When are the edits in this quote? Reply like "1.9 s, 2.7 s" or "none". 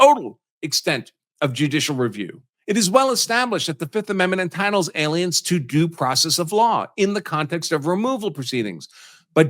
2.4 s